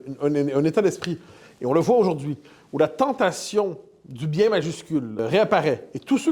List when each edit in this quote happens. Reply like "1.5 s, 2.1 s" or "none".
5.2 s

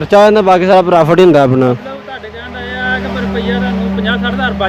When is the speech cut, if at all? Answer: none

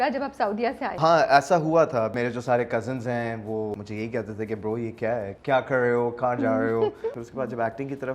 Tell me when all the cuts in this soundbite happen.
1.0 s, 2.1 s, 3.8 s, 5.3 s, 7.2 s

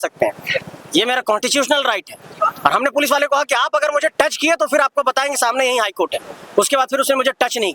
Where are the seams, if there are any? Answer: none

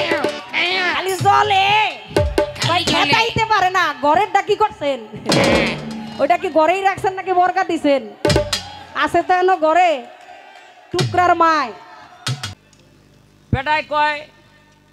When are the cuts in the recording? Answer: 12.4 s

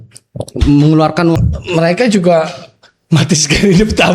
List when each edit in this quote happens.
1.4 s

